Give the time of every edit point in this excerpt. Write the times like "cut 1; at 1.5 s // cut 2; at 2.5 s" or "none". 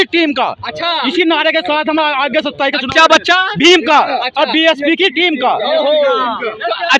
none